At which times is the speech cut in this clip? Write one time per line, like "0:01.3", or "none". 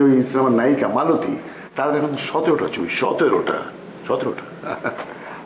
none